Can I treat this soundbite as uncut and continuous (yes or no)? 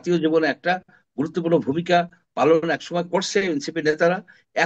yes